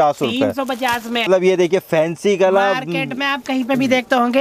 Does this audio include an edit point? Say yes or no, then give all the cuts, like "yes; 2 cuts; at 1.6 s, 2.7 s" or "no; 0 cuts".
yes; 1 cut; at 1.3 s